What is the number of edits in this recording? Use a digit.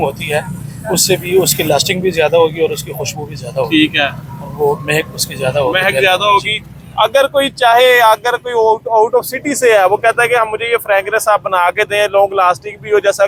0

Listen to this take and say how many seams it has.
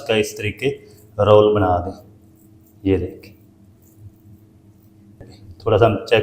1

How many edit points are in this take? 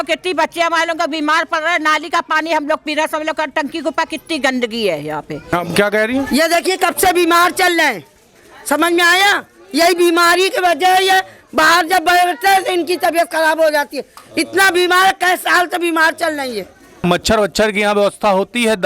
2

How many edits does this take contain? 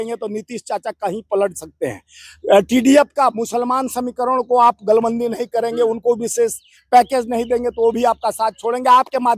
0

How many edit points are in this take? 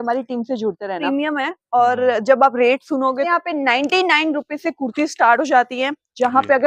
2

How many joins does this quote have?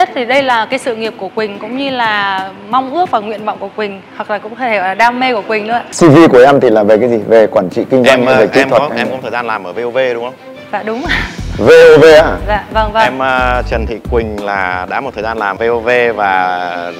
0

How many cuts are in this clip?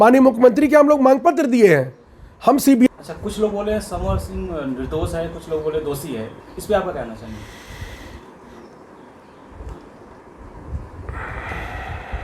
1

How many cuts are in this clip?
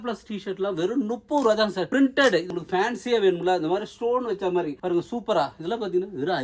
1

